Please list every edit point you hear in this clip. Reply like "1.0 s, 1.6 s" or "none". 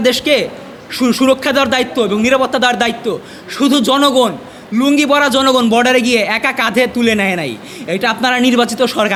none